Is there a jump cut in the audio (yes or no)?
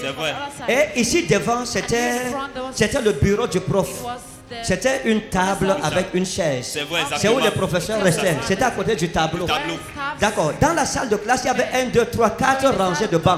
no